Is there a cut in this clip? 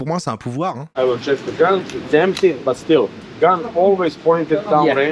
yes; 1 cut; at 0.9 s

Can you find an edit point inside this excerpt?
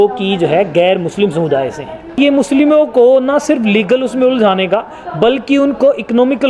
yes; 1 cut; at 2.2 s

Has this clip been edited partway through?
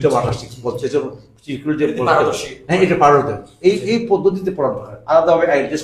no; 0 cuts

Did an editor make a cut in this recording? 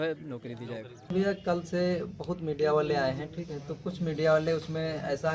yes; 1 cut; at 1.1 s

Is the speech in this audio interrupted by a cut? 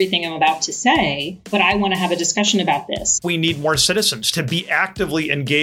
yes; 2 cuts; at 1.3 s, 3.2 s

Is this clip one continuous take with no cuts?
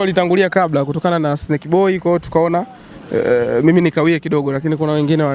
yes; 0 cuts

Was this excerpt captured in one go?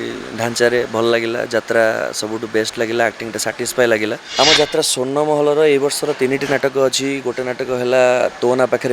no; 1 cut; at 4.2 s

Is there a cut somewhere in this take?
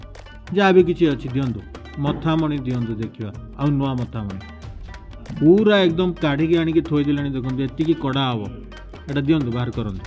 no; 0 cuts

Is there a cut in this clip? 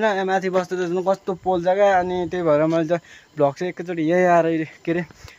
no; 0 cuts

